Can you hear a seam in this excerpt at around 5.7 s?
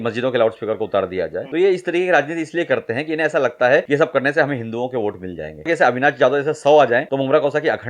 yes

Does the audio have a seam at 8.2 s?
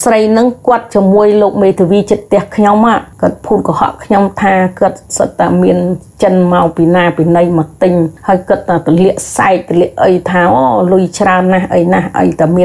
yes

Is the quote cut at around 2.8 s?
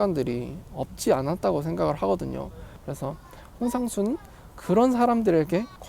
yes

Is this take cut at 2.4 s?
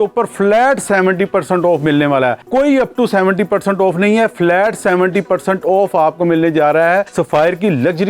yes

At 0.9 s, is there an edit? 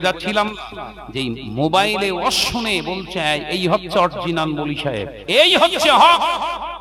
no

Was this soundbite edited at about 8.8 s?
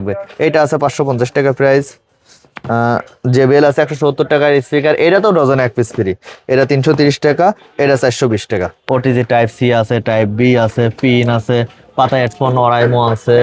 yes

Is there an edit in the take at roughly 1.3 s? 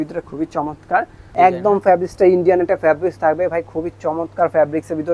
yes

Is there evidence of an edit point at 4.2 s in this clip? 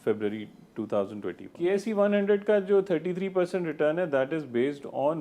no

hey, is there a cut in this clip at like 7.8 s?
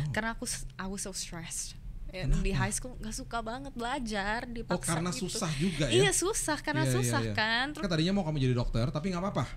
yes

